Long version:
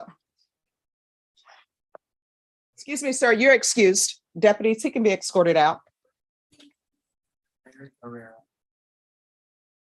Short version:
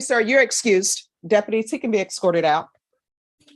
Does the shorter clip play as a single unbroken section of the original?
yes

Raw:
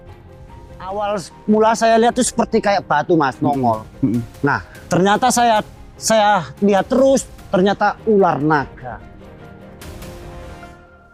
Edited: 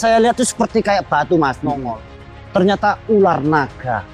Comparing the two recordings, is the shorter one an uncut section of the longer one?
no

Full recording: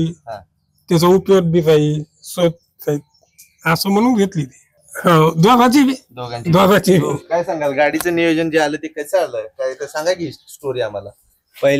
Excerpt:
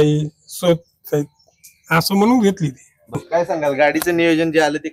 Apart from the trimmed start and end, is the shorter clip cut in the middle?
yes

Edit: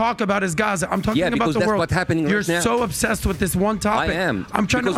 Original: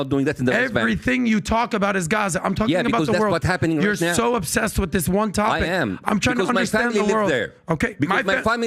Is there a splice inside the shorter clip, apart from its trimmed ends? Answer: no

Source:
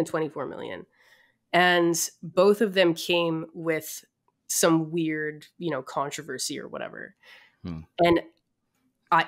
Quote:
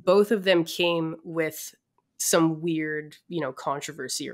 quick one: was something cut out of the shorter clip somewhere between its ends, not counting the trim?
no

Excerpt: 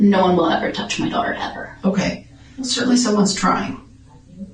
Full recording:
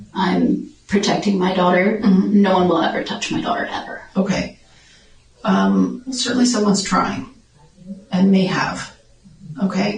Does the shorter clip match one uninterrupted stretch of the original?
no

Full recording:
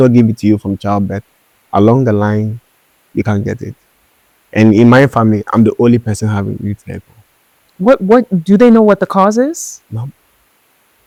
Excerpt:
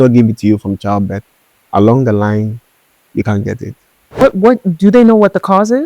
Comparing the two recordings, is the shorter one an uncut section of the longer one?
no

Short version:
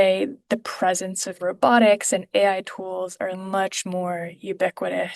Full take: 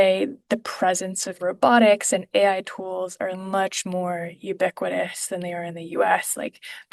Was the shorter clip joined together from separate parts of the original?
no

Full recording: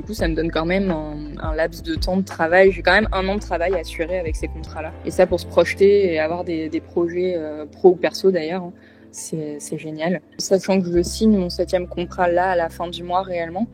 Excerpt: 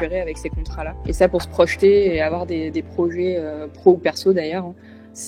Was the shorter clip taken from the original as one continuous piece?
yes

